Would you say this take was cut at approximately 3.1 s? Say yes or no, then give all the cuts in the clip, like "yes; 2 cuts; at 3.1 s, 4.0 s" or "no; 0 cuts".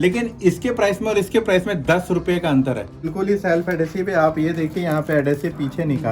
yes; 1 cut; at 3.1 s